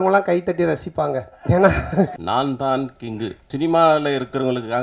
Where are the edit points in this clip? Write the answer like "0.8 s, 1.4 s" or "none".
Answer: 2.2 s, 3.4 s